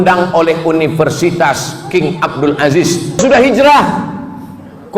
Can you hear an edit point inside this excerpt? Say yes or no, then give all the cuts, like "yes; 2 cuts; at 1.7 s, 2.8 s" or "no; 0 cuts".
yes; 1 cut; at 3.2 s